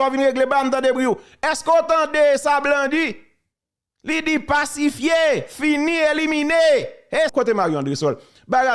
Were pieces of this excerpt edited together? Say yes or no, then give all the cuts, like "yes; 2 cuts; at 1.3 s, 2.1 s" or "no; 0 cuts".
yes; 1 cut; at 7.3 s